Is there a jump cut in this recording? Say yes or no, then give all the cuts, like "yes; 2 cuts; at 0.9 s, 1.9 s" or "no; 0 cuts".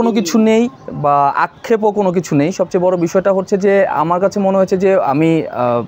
no; 0 cuts